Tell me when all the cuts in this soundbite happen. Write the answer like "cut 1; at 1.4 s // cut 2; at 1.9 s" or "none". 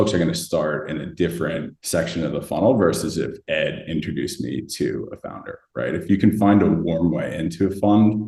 none